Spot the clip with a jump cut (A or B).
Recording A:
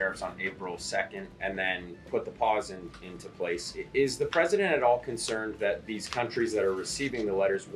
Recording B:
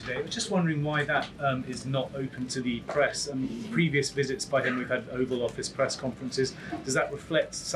A